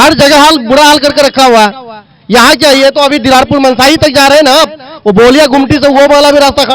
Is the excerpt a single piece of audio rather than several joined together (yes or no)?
yes